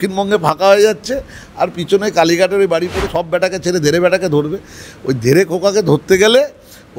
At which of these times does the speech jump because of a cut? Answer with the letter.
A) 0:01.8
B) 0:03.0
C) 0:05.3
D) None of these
B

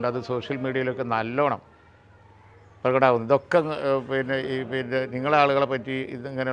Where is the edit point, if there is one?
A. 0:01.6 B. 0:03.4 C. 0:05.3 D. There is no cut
D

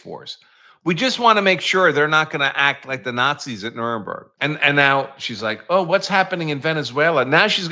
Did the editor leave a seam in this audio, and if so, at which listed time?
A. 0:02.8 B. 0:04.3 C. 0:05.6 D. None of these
B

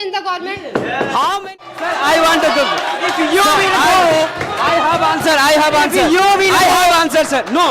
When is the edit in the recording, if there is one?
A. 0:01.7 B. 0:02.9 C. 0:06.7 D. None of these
A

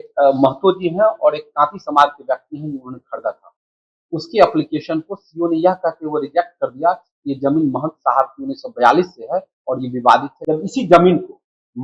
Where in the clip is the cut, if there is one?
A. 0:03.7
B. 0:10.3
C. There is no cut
B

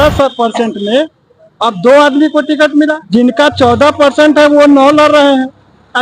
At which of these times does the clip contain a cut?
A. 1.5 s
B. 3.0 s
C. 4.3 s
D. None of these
B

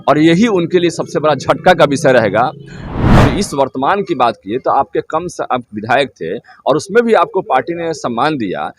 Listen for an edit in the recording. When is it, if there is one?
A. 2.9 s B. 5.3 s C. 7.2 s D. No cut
A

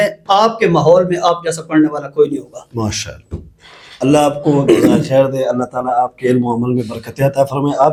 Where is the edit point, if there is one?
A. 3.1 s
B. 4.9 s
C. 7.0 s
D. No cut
D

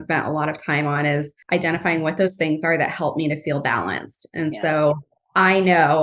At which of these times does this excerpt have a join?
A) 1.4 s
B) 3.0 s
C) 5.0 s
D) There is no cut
A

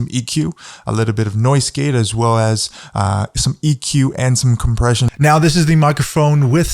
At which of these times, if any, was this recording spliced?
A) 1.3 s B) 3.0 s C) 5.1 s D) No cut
C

